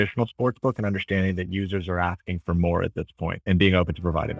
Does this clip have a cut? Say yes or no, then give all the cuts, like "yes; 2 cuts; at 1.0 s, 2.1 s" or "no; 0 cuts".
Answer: yes; 1 cut; at 3.4 s